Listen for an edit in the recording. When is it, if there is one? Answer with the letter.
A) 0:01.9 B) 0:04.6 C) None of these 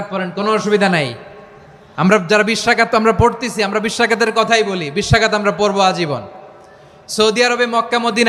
C